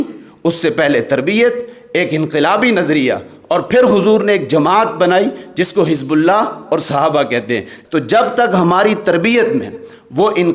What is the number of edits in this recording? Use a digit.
1